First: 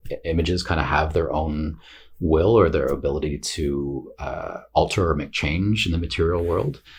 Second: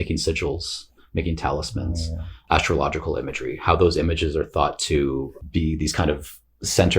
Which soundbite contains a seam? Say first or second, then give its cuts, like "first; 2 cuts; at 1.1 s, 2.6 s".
second; 2 cuts; at 2.3 s, 5.4 s